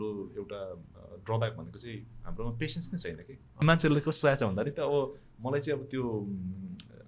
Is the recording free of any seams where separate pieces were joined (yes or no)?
no